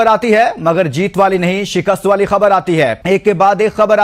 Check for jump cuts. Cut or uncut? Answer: uncut